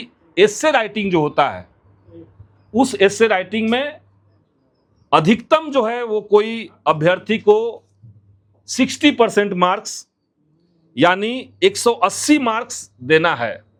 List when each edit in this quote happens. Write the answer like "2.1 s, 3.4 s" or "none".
none